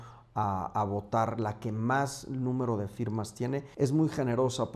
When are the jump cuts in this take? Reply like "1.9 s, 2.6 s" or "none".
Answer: 3.7 s

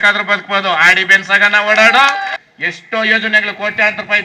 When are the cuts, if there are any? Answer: 2.4 s

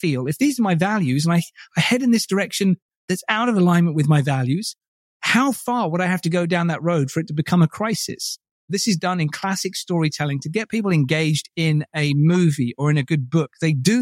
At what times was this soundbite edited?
8.7 s

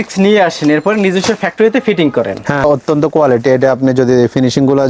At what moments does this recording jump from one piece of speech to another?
2.6 s

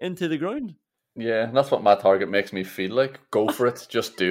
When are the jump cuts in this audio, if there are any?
none

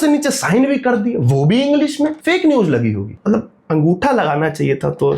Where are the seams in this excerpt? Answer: 2.2 s, 3.1 s

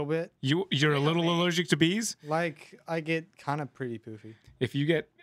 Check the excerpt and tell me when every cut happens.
none

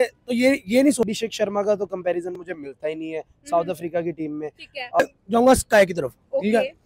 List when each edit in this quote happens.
1.0 s, 5.0 s

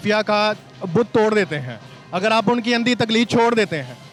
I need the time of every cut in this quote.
none

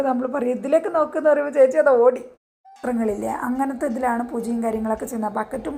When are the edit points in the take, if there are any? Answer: 2.8 s

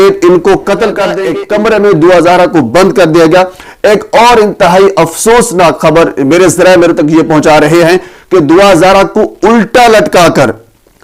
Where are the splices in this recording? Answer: 1.2 s

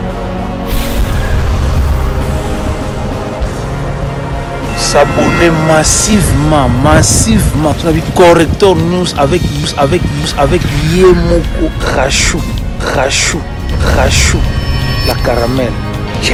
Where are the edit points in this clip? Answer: none

